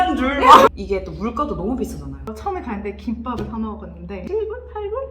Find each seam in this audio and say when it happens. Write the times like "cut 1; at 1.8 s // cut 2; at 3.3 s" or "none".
cut 1; at 0.7 s // cut 2; at 2.2 s // cut 3; at 4.2 s